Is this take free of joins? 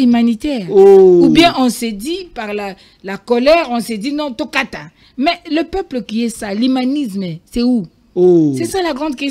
yes; 0 cuts

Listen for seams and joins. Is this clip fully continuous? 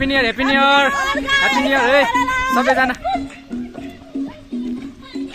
yes; 0 cuts

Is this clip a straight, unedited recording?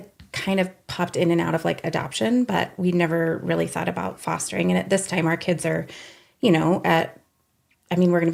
yes; 0 cuts

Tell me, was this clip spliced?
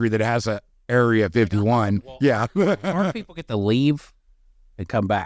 no; 0 cuts

